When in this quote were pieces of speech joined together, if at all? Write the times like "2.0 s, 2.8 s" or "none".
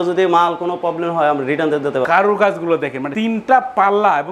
2.1 s, 3.1 s